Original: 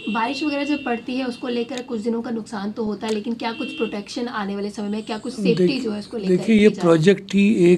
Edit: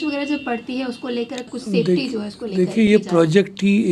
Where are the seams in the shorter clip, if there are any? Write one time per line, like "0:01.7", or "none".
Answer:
0:01.5